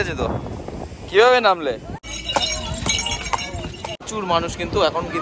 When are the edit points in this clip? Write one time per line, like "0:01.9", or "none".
0:02.0
0:04.0